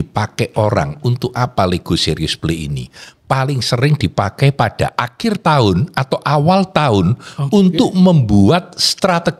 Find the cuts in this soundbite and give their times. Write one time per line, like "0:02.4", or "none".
none